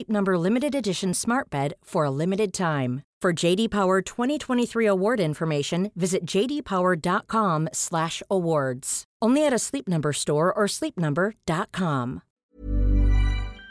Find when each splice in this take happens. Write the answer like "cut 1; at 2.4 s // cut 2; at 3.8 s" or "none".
cut 1; at 12.3 s